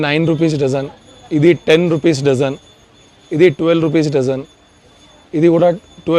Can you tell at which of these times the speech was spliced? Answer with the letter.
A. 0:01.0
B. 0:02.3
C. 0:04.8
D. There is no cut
D